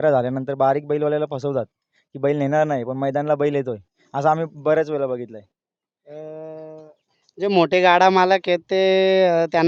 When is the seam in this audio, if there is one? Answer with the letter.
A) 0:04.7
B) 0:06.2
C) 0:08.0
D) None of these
D